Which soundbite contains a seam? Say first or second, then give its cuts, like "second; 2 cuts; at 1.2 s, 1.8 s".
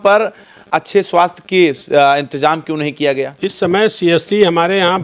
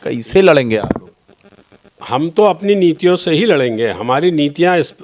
first; 1 cut; at 3.4 s